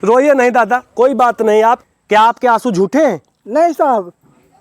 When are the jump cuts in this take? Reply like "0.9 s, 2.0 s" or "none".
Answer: 1.8 s